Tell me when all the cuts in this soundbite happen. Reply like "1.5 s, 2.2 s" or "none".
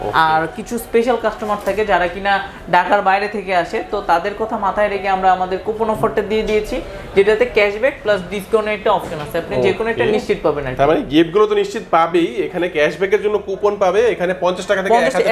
none

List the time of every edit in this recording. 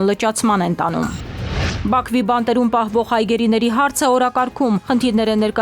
1.7 s

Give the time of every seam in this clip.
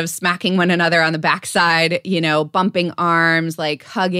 none

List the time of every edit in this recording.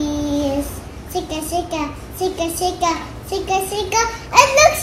0.9 s

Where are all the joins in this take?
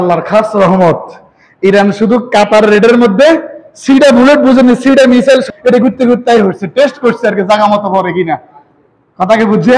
5.5 s

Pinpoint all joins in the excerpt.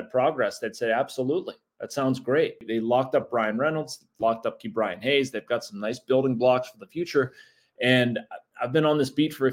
2.6 s

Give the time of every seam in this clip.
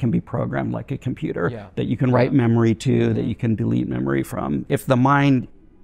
4.6 s

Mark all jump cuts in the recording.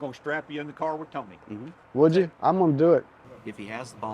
1.7 s, 2.3 s

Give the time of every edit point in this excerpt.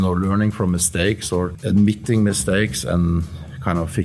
1.6 s

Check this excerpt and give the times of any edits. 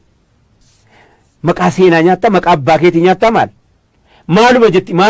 none

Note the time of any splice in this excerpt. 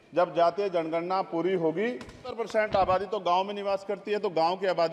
2.3 s

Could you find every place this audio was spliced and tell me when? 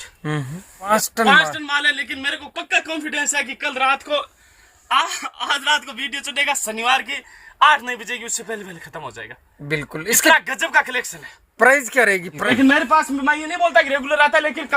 0.9 s, 12.4 s

